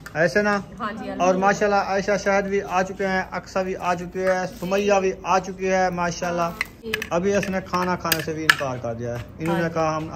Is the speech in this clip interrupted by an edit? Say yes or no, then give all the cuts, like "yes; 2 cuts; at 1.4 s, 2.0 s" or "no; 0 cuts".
yes; 1 cut; at 6.8 s